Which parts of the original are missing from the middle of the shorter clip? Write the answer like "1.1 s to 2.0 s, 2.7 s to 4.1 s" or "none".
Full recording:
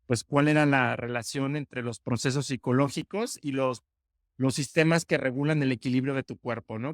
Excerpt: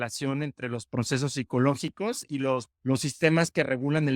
3.9 s to 4.3 s